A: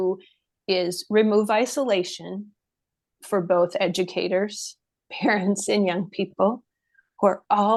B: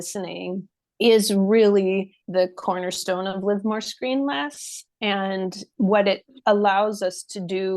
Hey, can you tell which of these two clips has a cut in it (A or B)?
B